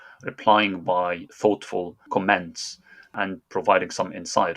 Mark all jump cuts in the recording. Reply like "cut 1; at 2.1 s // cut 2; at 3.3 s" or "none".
cut 1; at 2.0 s // cut 2; at 3.1 s